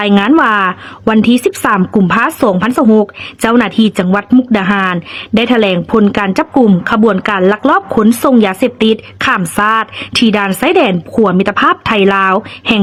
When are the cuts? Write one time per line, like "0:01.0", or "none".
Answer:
none